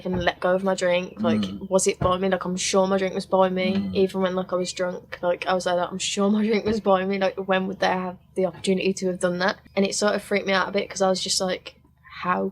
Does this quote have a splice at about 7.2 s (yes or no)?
no